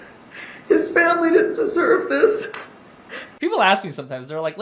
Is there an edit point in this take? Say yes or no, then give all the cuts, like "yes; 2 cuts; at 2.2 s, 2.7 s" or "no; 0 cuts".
yes; 1 cut; at 3.2 s